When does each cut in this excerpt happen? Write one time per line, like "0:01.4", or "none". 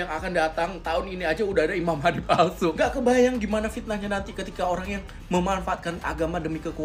none